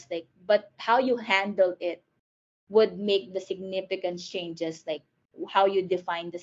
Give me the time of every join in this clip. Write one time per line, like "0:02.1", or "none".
none

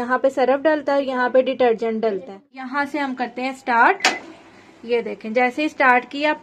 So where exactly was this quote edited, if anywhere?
0:02.5

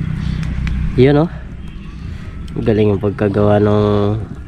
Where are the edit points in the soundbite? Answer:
none

